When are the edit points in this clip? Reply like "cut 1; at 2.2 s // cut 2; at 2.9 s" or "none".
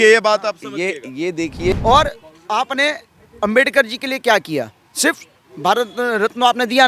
cut 1; at 1.7 s